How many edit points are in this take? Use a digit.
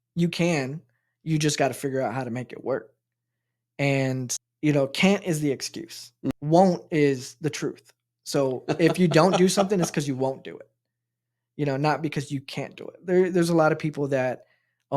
2